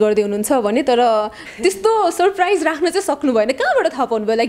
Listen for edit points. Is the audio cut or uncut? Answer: uncut